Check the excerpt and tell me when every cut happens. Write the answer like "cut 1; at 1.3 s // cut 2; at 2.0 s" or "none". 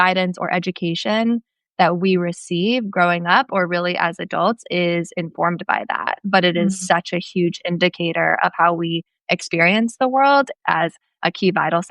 cut 1; at 10.5 s

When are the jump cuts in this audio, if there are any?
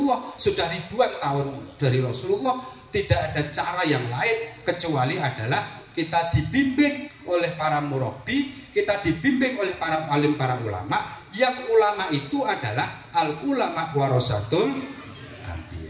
none

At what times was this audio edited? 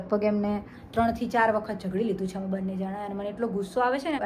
none

